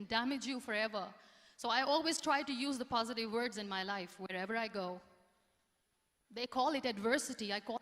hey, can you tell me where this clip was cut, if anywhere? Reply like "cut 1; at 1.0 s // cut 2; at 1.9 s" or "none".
none